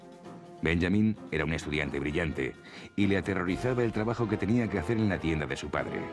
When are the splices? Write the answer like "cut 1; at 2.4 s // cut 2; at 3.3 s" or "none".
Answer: none